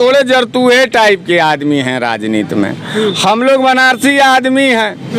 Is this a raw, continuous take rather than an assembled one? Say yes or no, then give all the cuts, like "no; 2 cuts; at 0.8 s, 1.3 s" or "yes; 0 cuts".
yes; 0 cuts